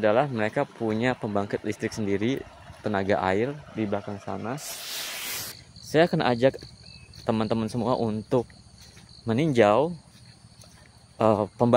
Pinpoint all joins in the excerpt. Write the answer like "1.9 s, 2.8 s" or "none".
5.3 s